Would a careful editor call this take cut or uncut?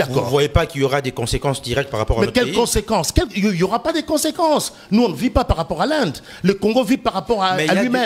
uncut